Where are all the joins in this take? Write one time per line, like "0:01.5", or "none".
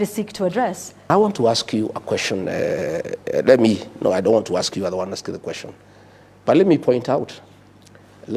0:01.1